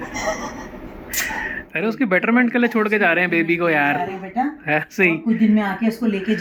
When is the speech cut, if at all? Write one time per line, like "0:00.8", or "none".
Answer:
none